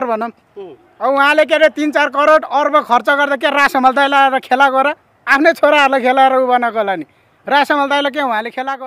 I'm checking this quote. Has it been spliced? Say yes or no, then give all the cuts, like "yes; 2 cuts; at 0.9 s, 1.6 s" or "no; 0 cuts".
no; 0 cuts